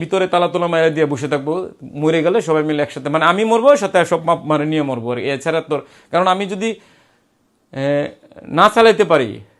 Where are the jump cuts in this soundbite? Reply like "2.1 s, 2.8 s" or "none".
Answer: none